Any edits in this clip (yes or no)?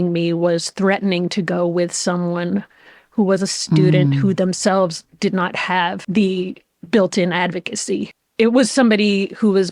yes